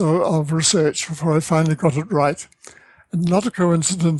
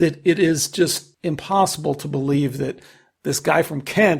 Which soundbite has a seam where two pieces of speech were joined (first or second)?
second